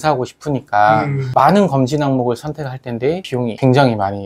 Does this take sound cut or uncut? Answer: cut